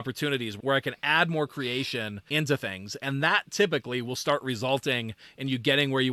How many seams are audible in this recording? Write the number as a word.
one